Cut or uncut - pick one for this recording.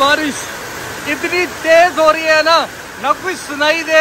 uncut